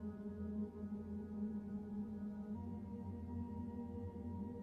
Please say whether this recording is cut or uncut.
uncut